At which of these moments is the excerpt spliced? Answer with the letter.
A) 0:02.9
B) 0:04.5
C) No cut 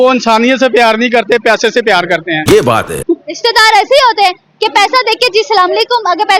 A